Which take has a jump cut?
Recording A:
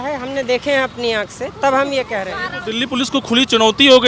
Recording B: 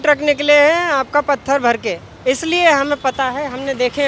B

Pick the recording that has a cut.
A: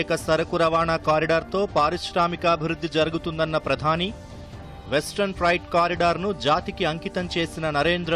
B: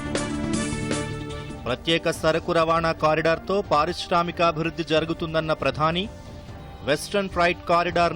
B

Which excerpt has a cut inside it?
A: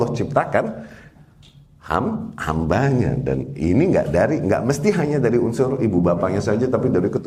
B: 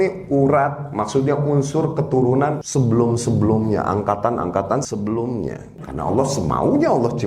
B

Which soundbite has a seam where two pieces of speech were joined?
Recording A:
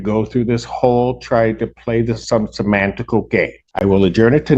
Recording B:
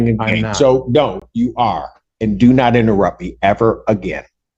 A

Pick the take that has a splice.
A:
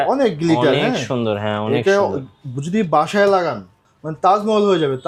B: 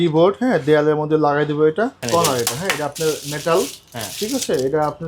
B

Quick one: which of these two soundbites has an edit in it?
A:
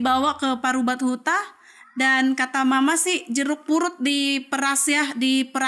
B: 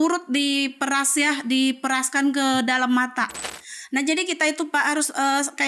B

